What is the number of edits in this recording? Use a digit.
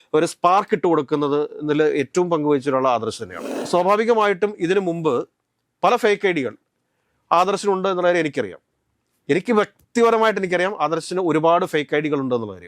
1